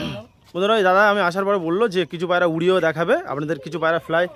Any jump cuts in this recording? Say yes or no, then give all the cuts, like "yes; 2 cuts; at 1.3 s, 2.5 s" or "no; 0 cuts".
no; 0 cuts